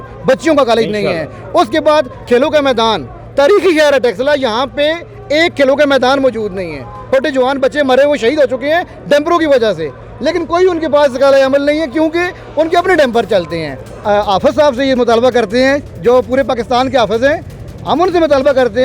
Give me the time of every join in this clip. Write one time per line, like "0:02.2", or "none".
0:06.9
0:13.9

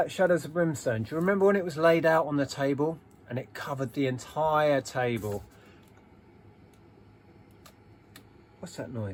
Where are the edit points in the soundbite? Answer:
none

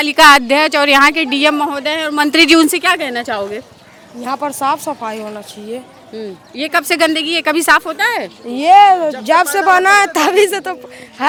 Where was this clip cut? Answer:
none

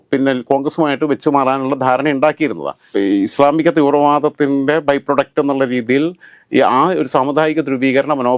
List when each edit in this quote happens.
0:02.9

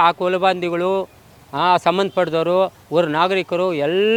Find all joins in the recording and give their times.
none

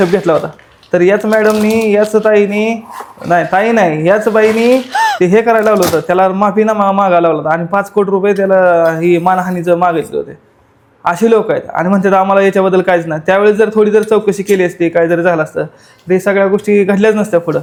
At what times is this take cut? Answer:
none

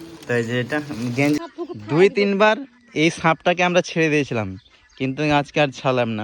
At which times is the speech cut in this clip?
0:01.4

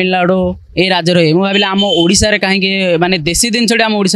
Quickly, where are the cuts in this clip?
none

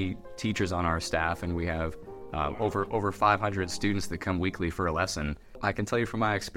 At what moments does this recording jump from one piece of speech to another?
0:05.6

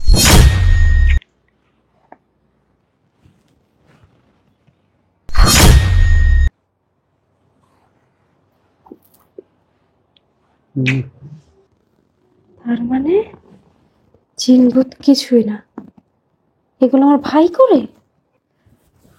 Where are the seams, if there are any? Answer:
0:01.1
0:02.8

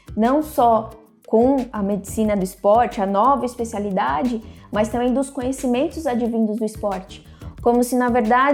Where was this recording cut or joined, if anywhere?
0:01.7

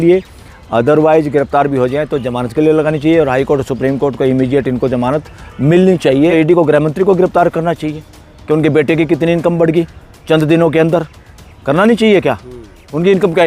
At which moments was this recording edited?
0:06.3

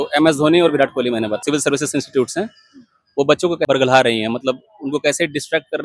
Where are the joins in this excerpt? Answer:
0:01.4
0:03.7

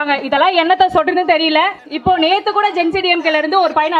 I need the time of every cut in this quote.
0:01.8

